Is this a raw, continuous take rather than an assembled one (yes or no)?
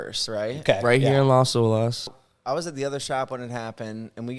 no